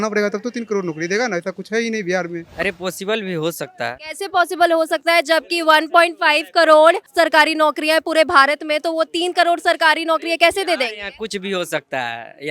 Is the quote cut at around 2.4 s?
yes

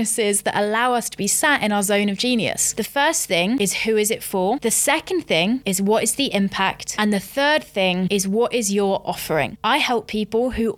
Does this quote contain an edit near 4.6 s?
yes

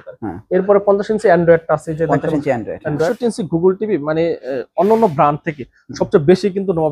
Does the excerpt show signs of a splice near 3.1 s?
yes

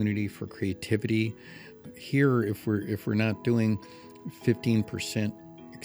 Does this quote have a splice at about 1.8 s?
yes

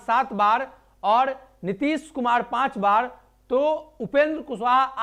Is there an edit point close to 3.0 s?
no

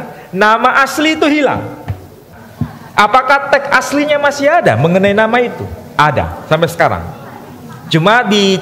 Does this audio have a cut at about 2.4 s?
yes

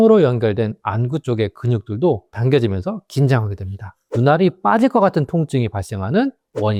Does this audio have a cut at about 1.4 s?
no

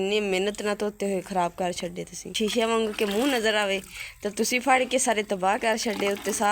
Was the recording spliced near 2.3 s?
yes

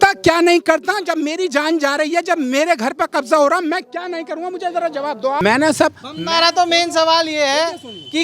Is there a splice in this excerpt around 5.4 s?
yes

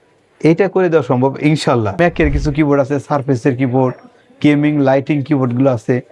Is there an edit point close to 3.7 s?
no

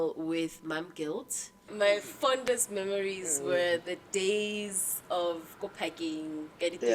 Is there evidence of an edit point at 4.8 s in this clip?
no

